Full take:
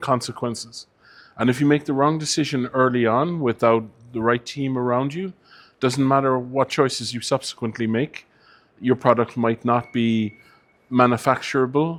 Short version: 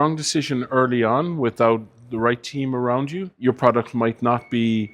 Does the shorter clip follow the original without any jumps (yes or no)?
no